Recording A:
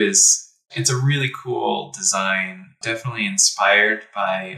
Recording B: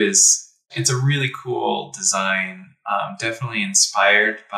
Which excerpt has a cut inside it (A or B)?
A